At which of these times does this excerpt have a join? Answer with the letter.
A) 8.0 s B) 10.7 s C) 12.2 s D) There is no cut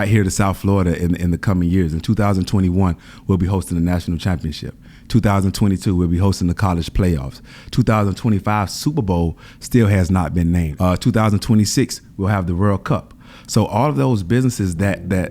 B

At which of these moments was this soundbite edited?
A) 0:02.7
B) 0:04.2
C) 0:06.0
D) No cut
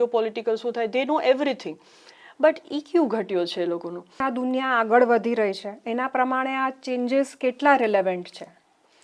B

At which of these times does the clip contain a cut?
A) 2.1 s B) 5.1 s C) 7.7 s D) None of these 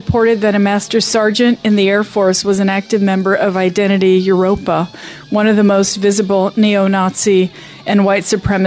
D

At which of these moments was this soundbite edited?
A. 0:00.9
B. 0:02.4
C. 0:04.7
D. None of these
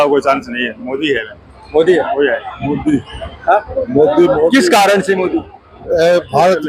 B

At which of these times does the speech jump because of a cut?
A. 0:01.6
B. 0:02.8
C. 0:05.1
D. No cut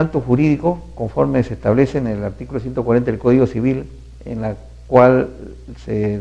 C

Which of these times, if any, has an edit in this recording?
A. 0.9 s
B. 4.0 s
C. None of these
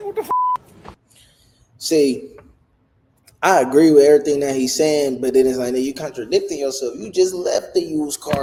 C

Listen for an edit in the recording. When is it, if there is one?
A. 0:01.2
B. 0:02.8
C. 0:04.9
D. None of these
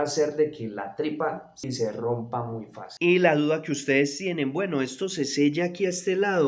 B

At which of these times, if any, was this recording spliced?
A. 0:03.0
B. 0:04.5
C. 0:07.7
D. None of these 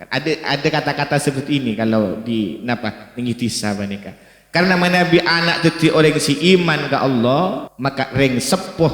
C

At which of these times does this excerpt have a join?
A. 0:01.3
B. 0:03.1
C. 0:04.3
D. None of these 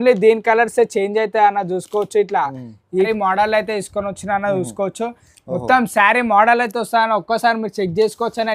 B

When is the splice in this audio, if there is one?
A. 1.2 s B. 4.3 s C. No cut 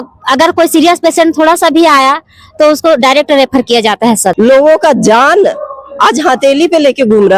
B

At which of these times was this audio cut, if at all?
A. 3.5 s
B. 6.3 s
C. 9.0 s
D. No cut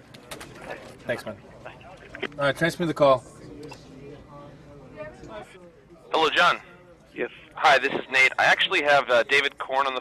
B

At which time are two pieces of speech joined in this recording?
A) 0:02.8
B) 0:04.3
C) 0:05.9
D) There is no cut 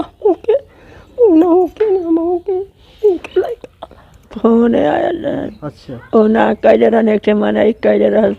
B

